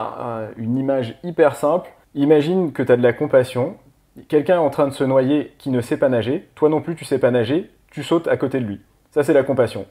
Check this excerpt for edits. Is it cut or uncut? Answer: cut